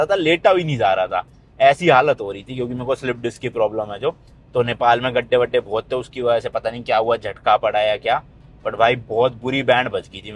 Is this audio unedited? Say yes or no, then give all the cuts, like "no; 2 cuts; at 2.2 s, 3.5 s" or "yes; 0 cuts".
yes; 0 cuts